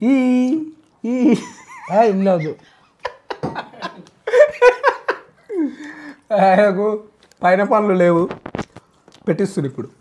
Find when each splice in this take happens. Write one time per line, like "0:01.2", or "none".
none